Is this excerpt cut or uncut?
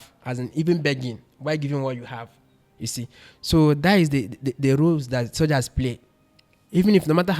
uncut